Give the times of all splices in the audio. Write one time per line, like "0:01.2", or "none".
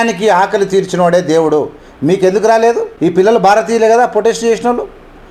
none